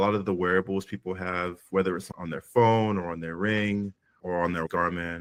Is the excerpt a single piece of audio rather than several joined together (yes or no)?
yes